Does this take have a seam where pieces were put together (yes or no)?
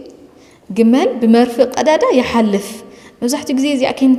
no